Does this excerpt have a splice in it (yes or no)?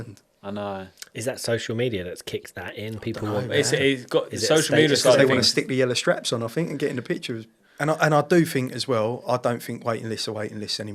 yes